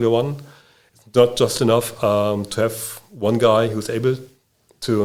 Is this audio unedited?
yes; 0 cuts

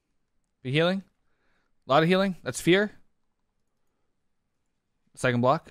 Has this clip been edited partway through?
no; 0 cuts

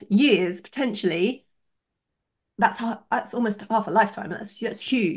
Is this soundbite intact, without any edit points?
yes; 0 cuts

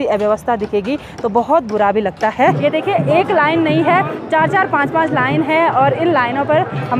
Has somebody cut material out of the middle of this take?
yes; 1 cut; at 2.6 s

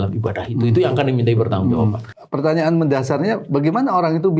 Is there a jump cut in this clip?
yes; 1 cut; at 2.1 s

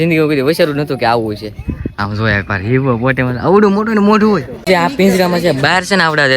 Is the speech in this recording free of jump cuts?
no; 1 cut; at 4.7 s

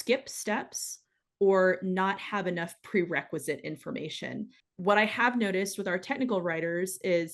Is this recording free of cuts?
no; 1 cut; at 4.6 s

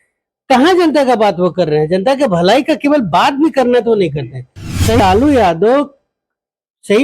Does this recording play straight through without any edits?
no; 1 cut; at 5.0 s

